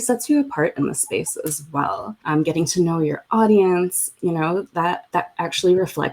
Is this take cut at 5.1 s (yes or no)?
yes